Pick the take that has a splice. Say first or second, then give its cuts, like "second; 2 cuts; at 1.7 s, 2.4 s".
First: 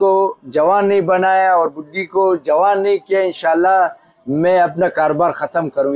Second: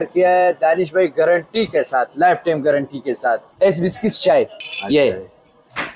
second; 2 cuts; at 3.5 s, 4.7 s